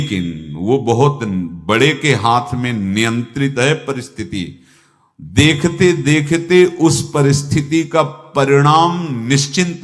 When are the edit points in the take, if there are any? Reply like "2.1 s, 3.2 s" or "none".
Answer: none